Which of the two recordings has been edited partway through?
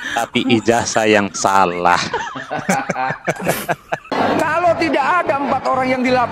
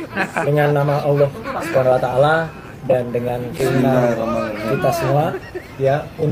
first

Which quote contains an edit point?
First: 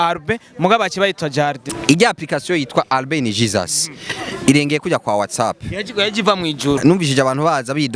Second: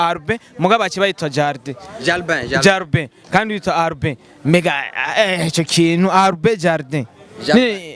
first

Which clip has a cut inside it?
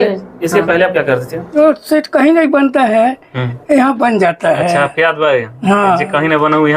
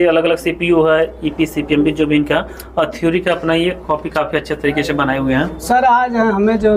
first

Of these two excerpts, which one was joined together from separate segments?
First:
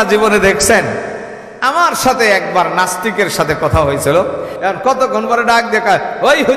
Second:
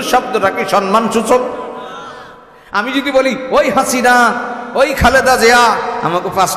first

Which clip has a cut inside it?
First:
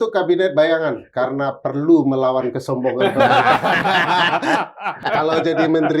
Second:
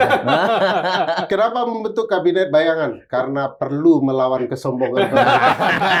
first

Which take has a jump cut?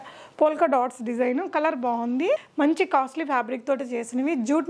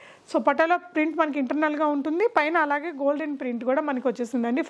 first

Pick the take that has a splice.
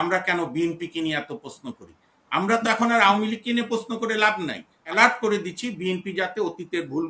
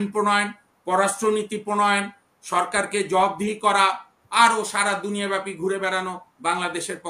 first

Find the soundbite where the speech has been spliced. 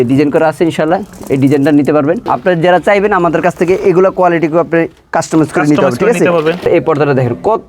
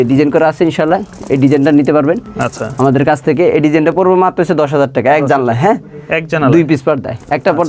first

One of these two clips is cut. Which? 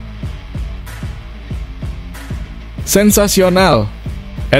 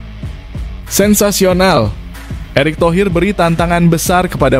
second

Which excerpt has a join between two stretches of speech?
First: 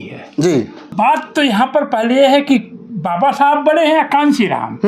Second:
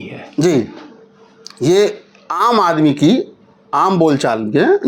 first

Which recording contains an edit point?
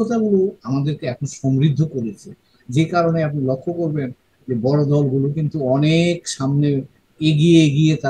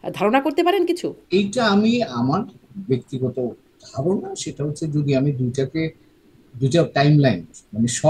second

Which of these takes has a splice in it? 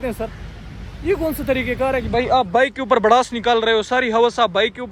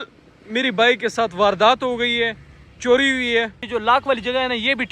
second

